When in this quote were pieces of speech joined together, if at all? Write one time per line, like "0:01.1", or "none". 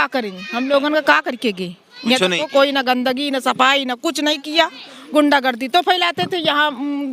none